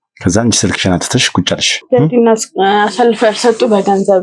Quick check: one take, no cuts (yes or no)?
no